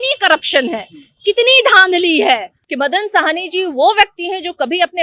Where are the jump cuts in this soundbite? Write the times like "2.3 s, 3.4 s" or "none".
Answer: 2.6 s